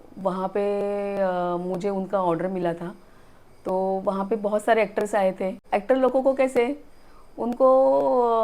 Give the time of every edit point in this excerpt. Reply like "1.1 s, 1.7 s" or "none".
5.6 s